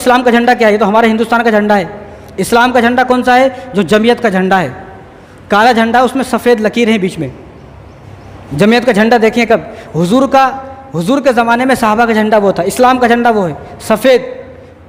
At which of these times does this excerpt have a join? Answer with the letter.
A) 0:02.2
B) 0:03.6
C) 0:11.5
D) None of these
D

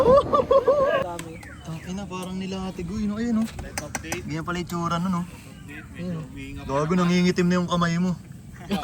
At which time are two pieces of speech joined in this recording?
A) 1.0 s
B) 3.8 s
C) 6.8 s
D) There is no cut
A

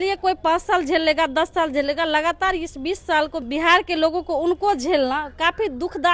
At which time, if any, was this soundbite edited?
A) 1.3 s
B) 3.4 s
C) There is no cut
B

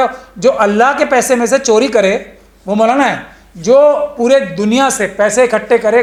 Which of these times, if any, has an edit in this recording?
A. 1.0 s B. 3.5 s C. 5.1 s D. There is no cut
D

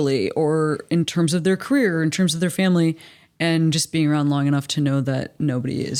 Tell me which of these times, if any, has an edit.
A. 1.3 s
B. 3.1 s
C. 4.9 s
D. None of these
D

